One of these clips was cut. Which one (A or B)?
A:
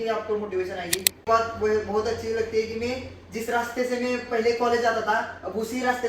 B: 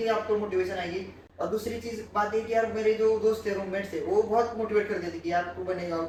A